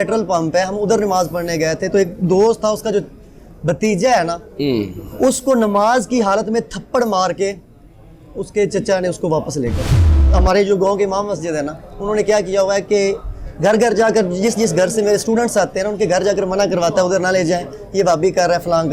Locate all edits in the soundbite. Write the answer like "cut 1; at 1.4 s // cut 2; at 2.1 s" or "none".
cut 1; at 10.1 s